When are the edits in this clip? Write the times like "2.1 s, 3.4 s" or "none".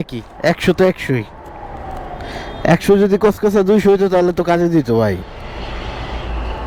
none